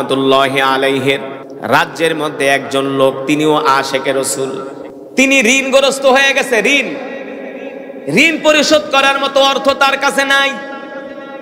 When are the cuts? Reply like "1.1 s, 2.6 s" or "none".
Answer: 1.4 s, 4.9 s